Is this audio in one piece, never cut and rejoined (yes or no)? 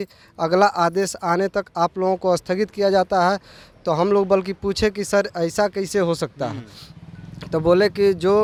yes